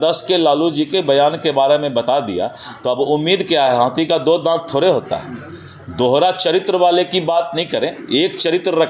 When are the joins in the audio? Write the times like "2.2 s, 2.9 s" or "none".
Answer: none